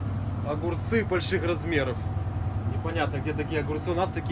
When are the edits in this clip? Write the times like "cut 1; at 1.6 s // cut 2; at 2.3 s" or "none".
none